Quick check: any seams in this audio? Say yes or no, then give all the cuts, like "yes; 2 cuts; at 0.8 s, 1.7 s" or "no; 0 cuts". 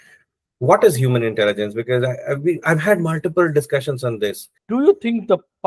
yes; 1 cut; at 4.5 s